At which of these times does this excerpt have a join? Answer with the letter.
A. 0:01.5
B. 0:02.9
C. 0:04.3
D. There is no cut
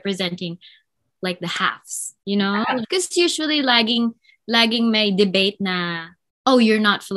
B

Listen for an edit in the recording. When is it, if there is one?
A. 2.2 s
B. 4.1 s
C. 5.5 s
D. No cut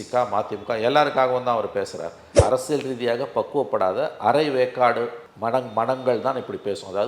A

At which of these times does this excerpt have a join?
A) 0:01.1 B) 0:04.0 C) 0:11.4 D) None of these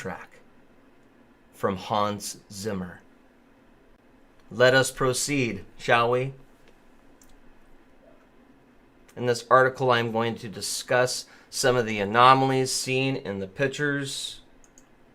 C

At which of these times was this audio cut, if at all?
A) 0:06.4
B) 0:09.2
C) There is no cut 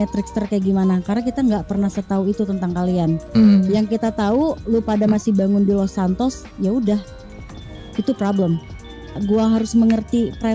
B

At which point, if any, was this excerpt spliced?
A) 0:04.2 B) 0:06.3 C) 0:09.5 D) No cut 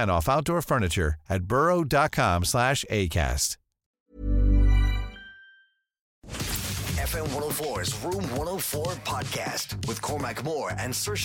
B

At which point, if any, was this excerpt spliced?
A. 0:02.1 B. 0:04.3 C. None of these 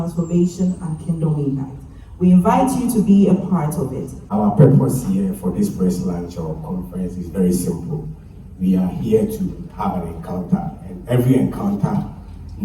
B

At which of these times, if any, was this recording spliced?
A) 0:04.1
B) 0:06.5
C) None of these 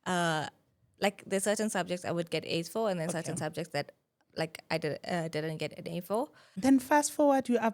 B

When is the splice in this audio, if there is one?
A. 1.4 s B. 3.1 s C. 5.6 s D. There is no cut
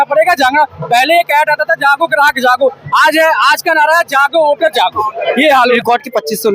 C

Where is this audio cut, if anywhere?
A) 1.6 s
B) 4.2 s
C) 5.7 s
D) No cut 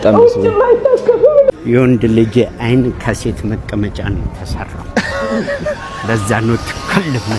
A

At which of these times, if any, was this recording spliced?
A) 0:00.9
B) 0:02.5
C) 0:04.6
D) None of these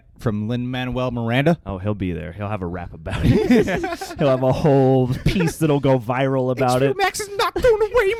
D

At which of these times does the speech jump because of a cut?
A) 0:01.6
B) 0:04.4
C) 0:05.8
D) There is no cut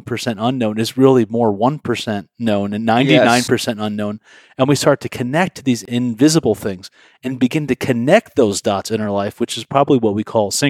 C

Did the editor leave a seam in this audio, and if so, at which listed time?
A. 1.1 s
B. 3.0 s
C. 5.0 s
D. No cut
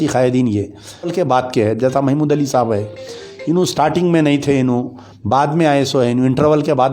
A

